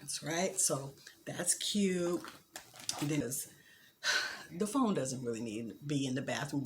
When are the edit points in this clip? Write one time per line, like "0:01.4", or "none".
0:03.2